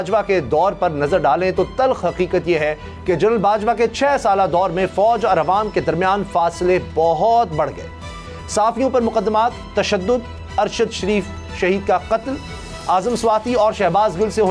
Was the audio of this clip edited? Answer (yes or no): no